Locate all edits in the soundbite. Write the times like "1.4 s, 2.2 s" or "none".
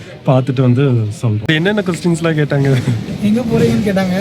1.5 s